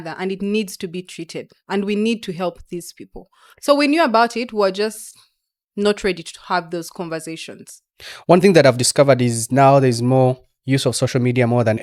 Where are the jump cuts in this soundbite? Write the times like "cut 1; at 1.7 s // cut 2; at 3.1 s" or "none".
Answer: none